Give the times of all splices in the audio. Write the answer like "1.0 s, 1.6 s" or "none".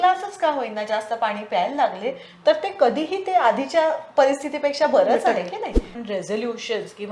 6.0 s